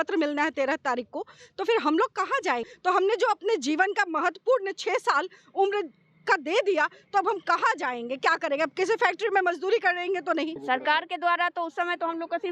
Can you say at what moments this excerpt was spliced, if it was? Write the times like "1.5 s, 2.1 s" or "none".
2.7 s, 10.6 s